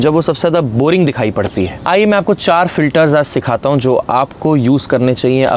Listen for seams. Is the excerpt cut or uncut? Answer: cut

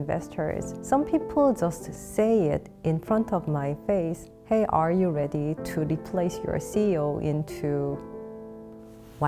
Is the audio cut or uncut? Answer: uncut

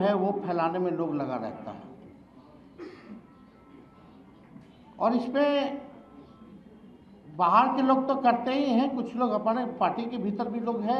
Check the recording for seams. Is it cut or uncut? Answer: uncut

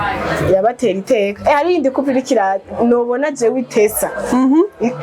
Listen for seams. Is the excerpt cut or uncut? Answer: uncut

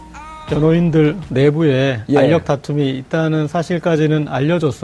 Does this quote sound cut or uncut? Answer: uncut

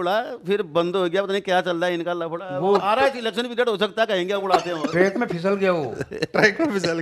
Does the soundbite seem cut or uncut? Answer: uncut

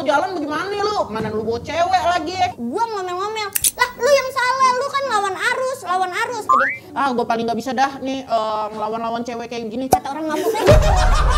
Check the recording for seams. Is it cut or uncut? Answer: cut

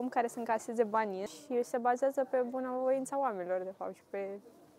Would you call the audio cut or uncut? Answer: cut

